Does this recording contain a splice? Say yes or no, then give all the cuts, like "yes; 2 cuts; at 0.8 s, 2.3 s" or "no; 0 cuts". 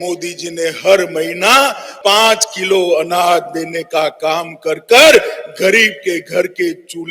yes; 1 cut; at 1.9 s